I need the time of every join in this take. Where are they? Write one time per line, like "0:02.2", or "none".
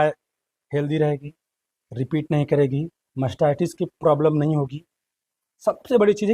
none